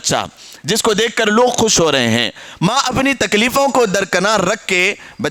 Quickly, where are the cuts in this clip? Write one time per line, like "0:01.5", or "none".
none